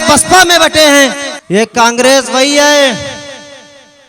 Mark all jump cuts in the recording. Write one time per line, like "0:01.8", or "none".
0:01.3